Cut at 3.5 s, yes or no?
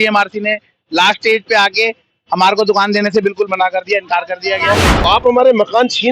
no